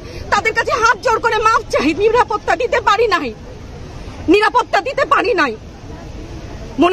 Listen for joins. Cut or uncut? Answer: uncut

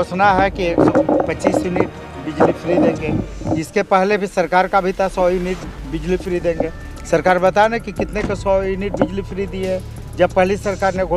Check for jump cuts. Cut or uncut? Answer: uncut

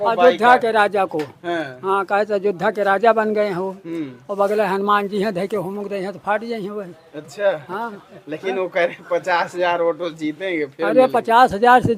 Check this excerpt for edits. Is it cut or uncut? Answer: uncut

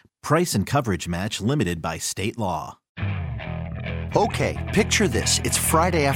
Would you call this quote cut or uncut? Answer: cut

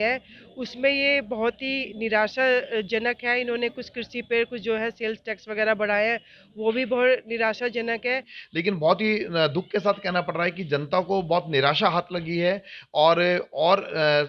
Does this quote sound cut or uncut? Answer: cut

